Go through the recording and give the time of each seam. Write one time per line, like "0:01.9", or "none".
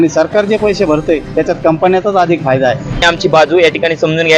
0:03.0